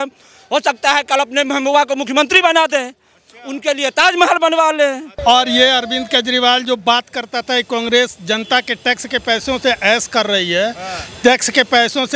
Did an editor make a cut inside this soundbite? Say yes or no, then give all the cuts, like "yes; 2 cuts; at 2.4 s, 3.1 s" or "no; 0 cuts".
yes; 1 cut; at 5.1 s